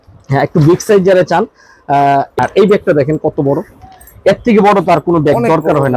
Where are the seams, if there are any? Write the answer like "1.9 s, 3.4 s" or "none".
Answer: 2.3 s